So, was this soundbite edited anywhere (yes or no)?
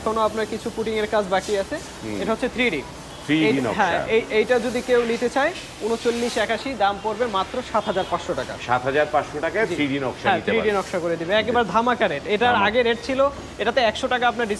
no